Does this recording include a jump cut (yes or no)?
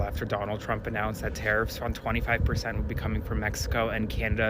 no